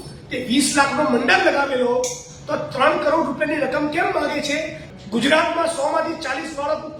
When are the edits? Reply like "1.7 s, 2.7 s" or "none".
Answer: 4.8 s

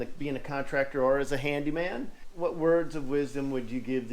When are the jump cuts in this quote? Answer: 2.2 s

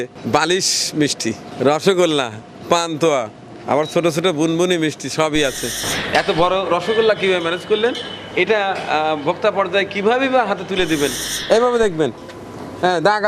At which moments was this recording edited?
5.8 s, 11.3 s

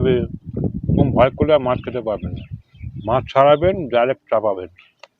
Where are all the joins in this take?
none

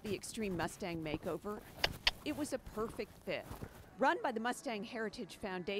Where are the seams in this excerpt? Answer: none

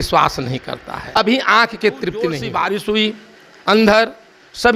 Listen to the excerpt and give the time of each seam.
2.4 s

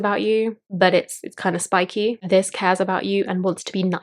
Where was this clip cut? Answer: none

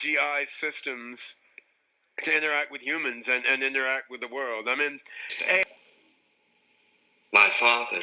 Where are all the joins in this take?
5.6 s

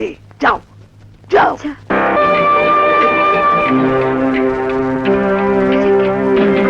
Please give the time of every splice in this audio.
2.2 s

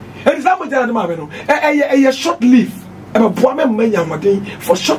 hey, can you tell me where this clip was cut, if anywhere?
none

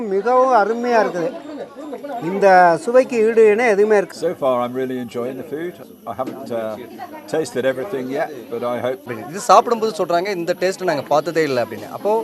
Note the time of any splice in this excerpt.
4.1 s, 9.1 s

